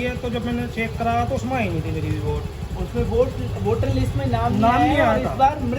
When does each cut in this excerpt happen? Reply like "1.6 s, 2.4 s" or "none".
none